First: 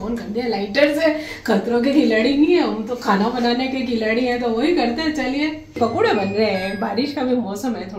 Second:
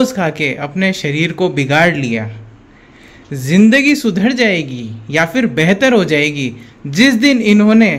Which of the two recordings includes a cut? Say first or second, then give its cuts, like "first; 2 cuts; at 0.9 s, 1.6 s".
first; 1 cut; at 5.8 s